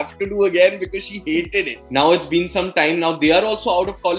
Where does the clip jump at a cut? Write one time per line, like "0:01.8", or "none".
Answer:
0:01.8